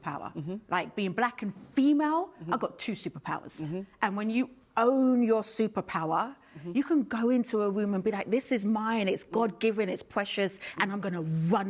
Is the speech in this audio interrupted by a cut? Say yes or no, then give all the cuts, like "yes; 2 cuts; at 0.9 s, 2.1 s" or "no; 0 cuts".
no; 0 cuts